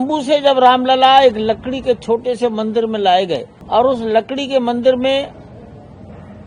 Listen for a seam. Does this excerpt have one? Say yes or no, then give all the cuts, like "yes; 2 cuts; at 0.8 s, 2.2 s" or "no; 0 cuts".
yes; 1 cut; at 3.5 s